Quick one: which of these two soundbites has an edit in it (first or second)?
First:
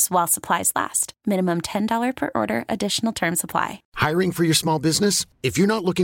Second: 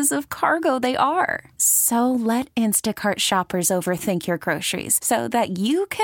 first